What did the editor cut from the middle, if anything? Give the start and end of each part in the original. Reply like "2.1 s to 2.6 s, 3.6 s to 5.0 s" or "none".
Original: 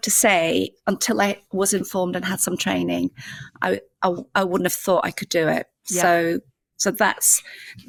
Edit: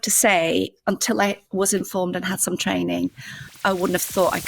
3.5 s to 4.2 s